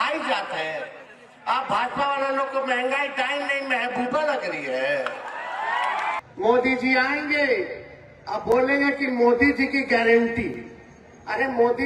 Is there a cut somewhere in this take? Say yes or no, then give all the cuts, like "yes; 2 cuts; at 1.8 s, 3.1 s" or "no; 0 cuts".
yes; 1 cut; at 6.2 s